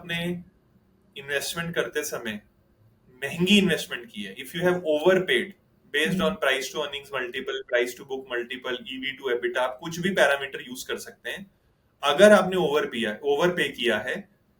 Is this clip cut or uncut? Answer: uncut